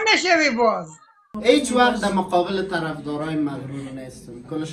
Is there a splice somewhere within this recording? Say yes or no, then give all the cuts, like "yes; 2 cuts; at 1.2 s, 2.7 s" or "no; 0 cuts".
yes; 1 cut; at 1.2 s